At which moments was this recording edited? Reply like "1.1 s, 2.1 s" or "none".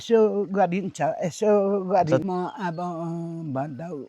2.2 s